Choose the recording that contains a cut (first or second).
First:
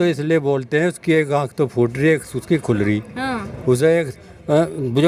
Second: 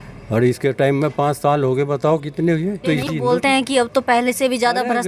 second